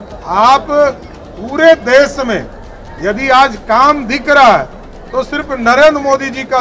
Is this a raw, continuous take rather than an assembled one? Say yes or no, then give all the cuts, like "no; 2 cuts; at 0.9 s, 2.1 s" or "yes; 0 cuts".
yes; 0 cuts